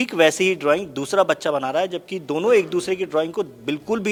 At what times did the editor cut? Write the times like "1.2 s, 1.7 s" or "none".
none